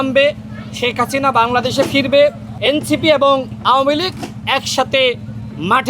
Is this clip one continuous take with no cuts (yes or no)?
no